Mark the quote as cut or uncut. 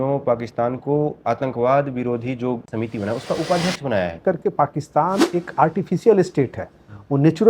cut